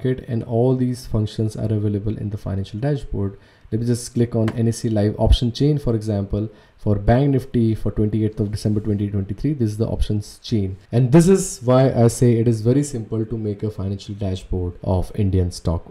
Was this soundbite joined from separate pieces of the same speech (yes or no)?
no